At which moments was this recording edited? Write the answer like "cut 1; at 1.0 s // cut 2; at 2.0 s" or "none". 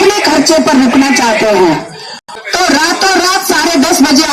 cut 1; at 2.2 s